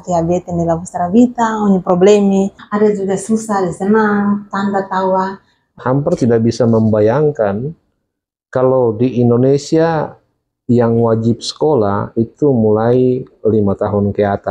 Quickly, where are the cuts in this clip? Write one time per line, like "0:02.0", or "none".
0:02.6
0:05.7